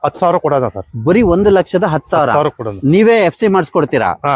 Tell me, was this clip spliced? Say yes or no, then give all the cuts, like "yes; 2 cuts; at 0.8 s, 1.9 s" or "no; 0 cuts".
no; 0 cuts